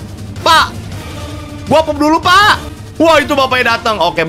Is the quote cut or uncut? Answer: cut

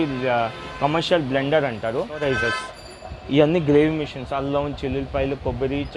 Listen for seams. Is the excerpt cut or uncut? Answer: cut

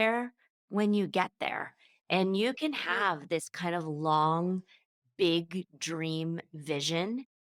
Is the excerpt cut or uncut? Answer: uncut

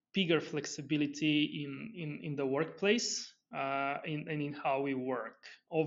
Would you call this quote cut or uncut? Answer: uncut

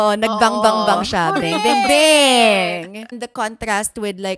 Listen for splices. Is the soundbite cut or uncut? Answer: cut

